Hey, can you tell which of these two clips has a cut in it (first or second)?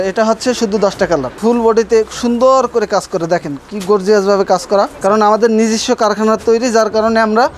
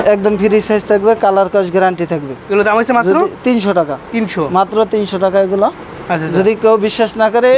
first